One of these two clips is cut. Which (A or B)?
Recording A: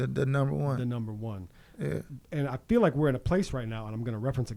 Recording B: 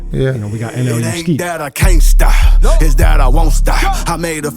B